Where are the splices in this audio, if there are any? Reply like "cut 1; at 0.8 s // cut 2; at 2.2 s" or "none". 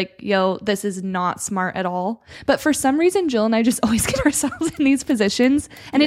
none